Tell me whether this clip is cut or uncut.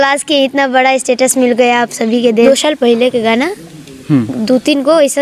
cut